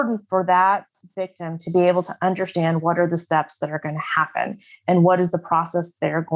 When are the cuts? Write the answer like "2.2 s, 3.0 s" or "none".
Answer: none